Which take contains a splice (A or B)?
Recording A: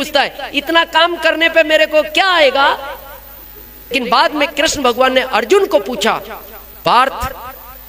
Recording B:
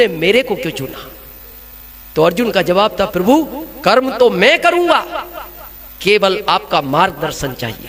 A